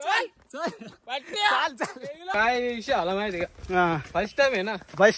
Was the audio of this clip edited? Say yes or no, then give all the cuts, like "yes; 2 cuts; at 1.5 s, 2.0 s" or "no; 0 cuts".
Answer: yes; 1 cut; at 2.3 s